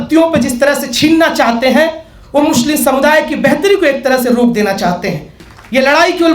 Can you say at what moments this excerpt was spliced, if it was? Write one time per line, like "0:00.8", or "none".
0:05.4